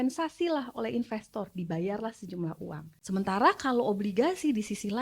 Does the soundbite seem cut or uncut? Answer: cut